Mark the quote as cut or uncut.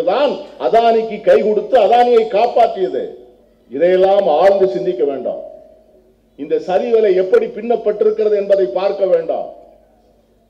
uncut